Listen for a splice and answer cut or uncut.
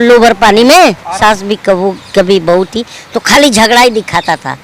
cut